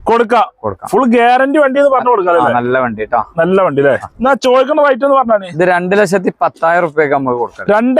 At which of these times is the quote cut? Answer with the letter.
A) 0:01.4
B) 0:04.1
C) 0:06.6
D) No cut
B